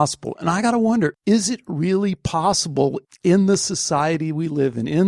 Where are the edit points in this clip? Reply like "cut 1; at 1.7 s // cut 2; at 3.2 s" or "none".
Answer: cut 1; at 1.1 s